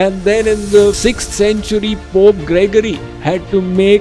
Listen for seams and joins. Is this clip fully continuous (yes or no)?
no